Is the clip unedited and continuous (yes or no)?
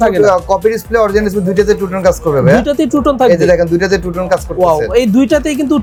yes